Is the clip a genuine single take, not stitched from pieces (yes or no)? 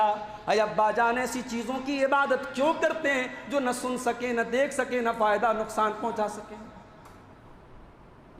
yes